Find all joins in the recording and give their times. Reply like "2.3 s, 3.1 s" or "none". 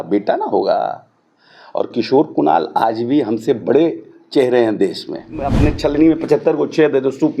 5.5 s